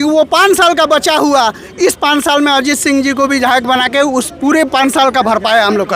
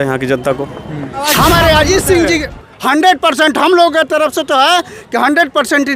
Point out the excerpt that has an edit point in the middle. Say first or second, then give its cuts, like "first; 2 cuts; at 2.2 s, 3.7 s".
second; 1 cut; at 1.3 s